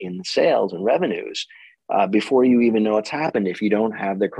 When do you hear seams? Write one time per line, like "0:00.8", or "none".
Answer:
none

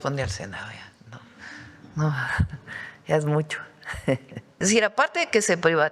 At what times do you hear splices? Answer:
0:04.5

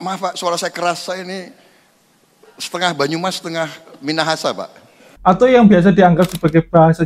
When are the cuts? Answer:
0:05.1

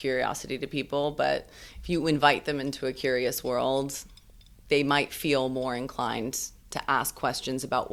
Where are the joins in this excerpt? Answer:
none

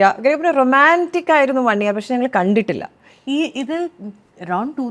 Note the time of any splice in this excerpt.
none

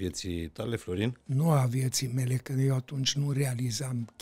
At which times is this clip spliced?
none

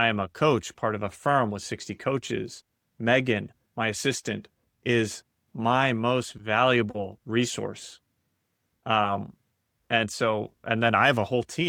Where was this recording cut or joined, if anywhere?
none

